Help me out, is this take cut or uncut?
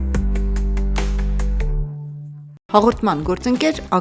cut